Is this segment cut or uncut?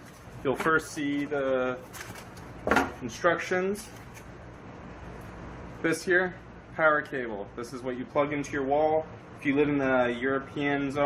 cut